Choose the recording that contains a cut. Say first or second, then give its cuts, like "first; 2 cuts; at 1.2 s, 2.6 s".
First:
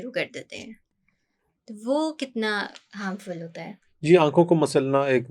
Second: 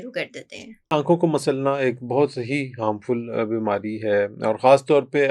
second; 1 cut; at 0.9 s